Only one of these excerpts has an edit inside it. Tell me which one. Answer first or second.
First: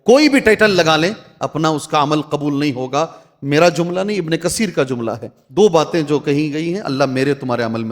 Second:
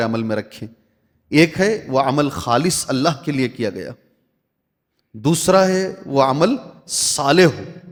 first